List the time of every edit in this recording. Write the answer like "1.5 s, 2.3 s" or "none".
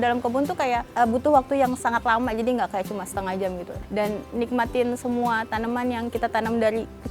0.9 s, 3.7 s